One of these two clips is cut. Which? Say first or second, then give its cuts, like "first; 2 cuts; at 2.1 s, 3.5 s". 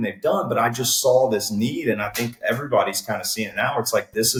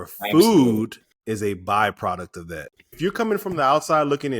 second; 2 cuts; at 1.1 s, 2.9 s